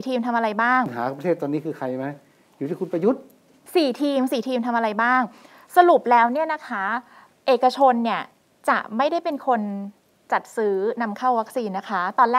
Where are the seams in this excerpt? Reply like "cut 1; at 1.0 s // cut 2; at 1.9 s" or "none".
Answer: cut 1; at 1.0 s // cut 2; at 3.6 s